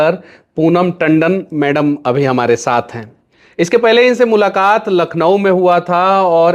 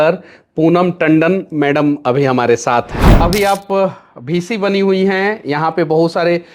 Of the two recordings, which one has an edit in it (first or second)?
second